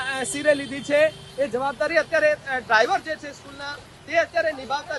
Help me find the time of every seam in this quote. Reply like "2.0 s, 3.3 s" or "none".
none